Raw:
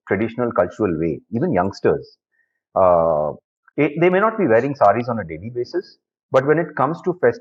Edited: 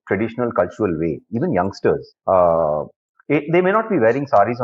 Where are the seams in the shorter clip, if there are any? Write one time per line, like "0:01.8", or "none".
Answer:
0:02.1